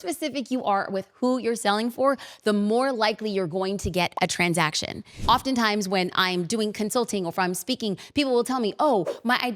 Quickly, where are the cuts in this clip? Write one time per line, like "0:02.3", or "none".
0:05.2

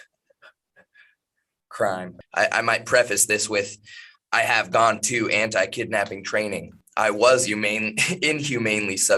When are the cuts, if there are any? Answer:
0:02.2
0:06.8

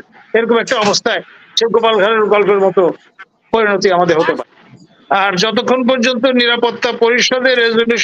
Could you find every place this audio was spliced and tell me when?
0:04.4

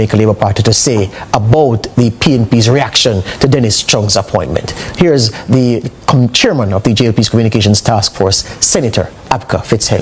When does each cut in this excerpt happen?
none

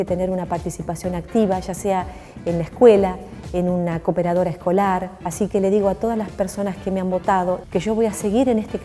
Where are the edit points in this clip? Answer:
0:05.1
0:07.6

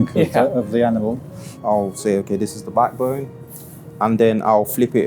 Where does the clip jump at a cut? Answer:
0:01.5

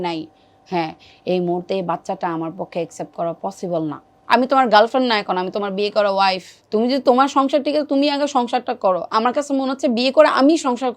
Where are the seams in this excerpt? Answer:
0:04.1
0:06.5

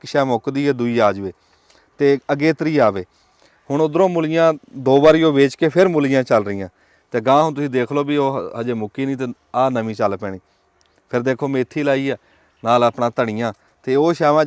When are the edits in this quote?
none

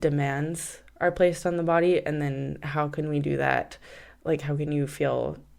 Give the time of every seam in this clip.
none

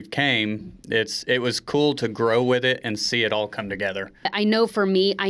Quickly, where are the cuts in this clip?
0:04.3

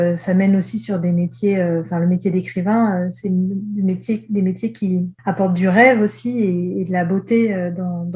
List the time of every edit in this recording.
0:05.1

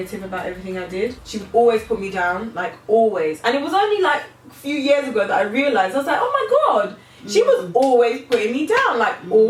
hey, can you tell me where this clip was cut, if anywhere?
none

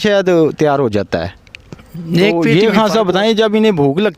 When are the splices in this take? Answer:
0:02.4

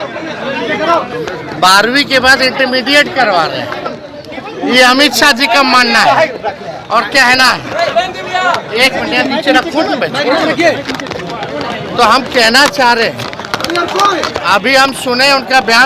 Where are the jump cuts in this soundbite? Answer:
none

